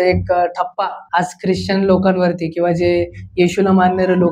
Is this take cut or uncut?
cut